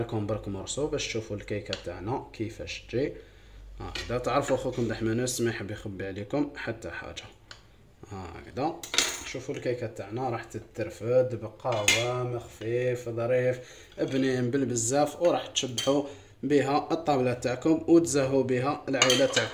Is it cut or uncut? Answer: uncut